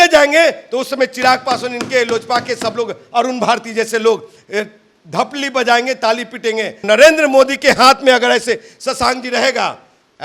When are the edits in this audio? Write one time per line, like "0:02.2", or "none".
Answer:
0:06.8